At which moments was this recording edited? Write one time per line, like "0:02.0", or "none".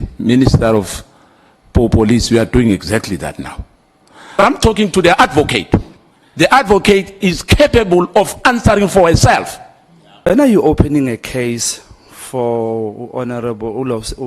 0:04.4
0:10.3